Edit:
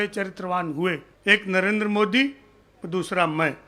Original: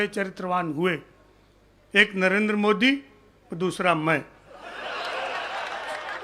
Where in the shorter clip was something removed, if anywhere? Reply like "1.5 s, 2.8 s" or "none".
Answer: 1.1 s